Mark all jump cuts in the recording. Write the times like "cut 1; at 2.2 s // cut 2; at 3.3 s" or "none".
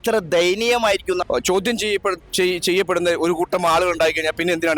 cut 1; at 1.2 s